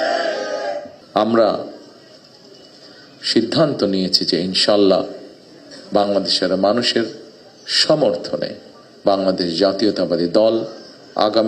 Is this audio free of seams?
no; 1 cut; at 1.0 s

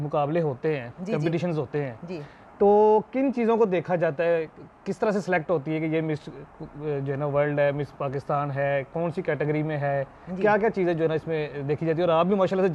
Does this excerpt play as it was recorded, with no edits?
yes; 0 cuts

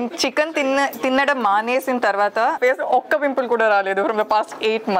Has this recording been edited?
yes; 1 cut; at 2.6 s

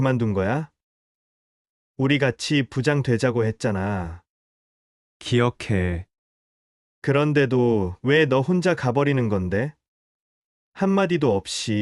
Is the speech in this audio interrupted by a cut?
no; 0 cuts

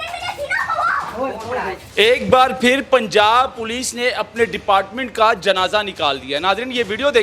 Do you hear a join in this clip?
yes; 1 cut; at 1.8 s

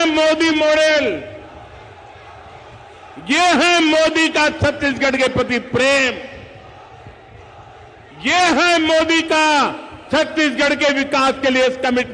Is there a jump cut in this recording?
no; 0 cuts

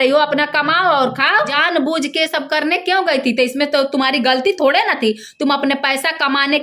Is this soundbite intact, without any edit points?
no; 1 cut; at 1.5 s

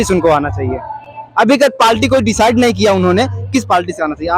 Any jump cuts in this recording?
no; 0 cuts

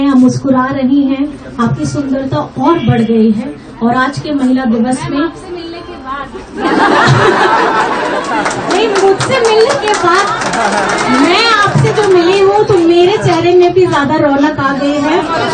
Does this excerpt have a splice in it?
no; 0 cuts

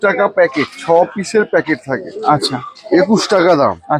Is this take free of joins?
yes; 0 cuts

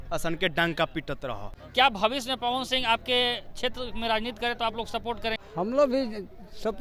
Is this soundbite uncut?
no; 2 cuts; at 1.5 s, 5.4 s

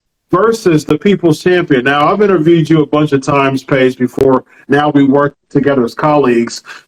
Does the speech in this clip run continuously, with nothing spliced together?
yes; 0 cuts

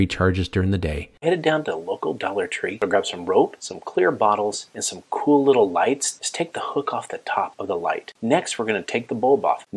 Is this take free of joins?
no; 1 cut; at 1.1 s

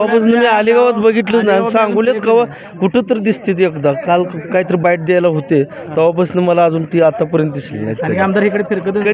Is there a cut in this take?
no; 0 cuts

